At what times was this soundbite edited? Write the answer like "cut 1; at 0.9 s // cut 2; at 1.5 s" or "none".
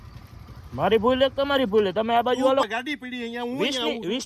cut 1; at 2.7 s